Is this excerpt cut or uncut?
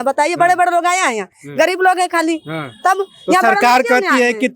uncut